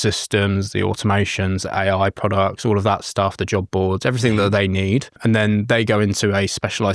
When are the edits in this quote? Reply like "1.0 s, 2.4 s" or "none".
5.2 s